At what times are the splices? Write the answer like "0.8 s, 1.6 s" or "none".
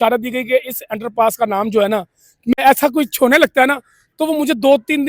2.5 s